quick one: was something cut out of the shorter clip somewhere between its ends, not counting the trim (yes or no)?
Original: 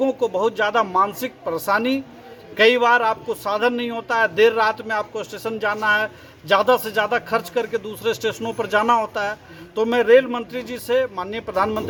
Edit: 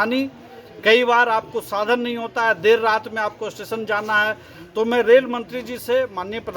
yes